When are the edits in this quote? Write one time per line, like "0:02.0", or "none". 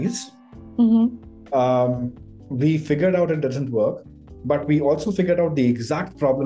none